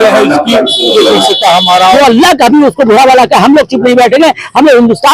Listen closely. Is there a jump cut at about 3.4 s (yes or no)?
no